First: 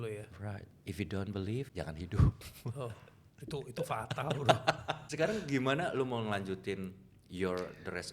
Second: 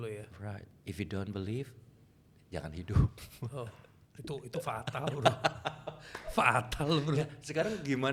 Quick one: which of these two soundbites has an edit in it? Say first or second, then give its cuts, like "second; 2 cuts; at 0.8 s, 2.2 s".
first; 2 cuts; at 1.7 s, 5.0 s